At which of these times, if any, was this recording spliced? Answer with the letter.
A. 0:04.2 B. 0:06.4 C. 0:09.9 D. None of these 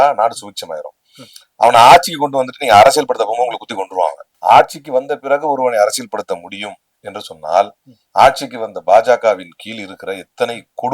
A